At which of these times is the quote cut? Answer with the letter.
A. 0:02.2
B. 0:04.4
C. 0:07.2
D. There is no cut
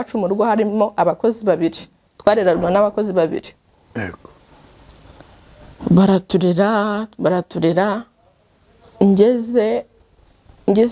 D